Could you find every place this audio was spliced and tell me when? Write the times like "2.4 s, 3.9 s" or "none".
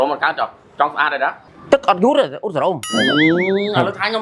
none